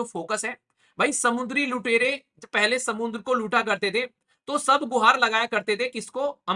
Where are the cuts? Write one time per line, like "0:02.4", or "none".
none